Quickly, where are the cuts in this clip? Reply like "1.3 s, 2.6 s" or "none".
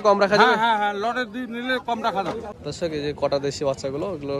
2.5 s